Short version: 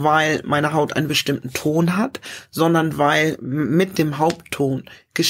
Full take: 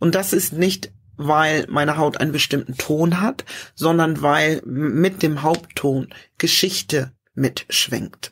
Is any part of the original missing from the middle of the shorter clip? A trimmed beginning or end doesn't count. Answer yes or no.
no